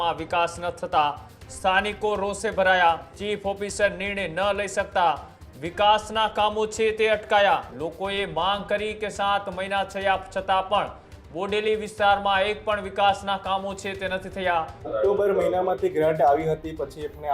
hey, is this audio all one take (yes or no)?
no